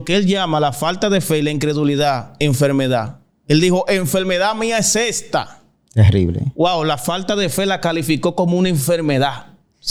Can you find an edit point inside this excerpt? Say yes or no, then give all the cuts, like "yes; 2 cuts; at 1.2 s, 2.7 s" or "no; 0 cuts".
no; 0 cuts